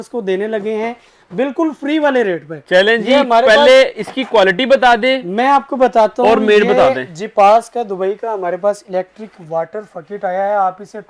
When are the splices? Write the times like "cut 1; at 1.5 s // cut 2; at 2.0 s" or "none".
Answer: none

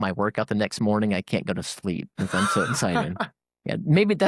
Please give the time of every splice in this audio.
none

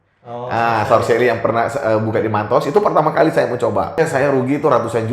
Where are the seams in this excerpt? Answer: cut 1; at 4.0 s

